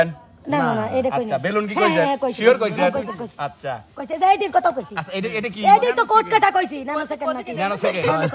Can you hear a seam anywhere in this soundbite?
no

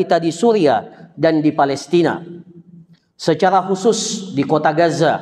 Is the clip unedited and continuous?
yes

